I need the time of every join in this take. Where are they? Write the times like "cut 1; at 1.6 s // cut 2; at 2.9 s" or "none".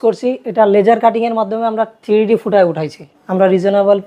cut 1; at 3.2 s